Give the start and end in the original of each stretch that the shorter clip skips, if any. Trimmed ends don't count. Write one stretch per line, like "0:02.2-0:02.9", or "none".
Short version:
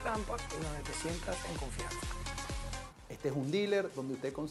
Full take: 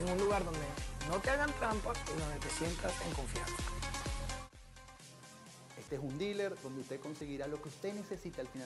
0:04.6-0:05.7

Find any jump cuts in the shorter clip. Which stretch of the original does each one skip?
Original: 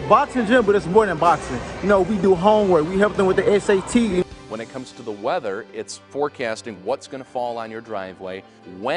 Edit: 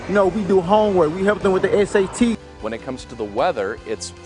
0:04.1-0:04.2

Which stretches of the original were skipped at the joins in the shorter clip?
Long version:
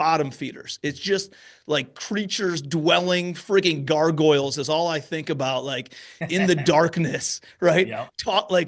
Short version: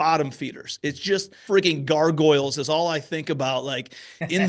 0:01.4-0:03.4

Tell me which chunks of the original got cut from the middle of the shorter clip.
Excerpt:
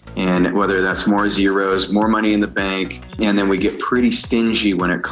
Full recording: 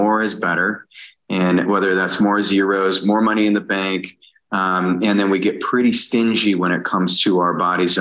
0:04.3-0:05.0

